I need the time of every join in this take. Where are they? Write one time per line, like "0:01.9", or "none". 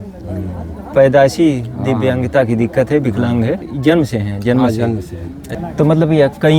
0:03.7
0:05.5